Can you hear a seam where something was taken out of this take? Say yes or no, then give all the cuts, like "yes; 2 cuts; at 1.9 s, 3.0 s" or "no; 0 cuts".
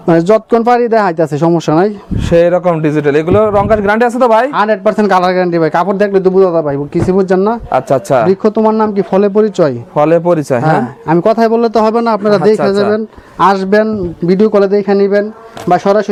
no; 0 cuts